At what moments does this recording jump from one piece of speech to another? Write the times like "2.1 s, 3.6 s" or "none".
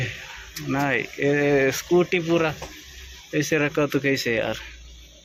none